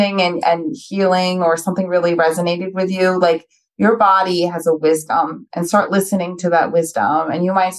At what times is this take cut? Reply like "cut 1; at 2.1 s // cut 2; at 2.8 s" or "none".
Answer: none